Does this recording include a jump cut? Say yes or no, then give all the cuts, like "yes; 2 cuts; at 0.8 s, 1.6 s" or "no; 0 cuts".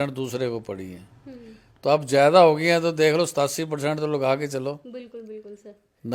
no; 0 cuts